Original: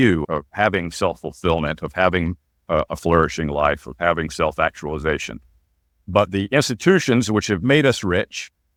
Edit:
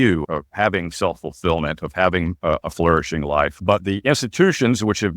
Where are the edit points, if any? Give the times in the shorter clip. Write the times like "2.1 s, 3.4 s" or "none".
2.3 s, 3.6 s